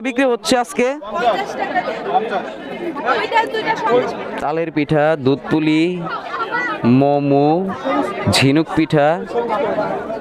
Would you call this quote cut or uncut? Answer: uncut